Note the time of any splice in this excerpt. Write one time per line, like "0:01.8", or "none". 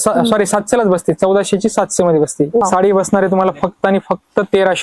0:02.7